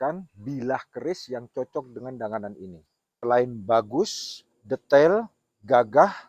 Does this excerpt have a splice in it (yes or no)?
yes